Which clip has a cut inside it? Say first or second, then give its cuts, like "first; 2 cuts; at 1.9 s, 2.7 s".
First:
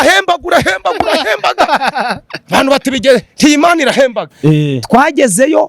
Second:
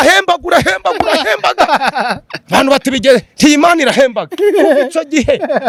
first; 1 cut; at 4.3 s